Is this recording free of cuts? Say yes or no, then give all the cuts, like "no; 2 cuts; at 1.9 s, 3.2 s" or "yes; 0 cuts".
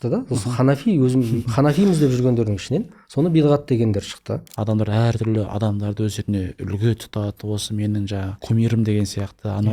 no; 2 cuts; at 4.5 s, 8.4 s